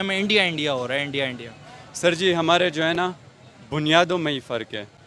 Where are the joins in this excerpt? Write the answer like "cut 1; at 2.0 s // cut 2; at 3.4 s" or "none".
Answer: none